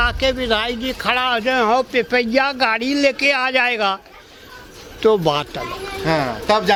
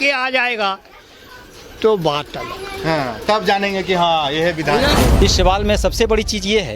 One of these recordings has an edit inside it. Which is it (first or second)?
second